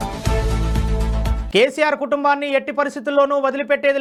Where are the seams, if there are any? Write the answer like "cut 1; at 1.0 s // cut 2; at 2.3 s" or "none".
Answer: none